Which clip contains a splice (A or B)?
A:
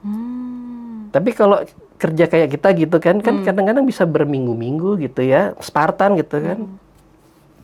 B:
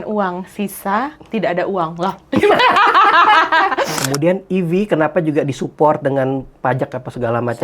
B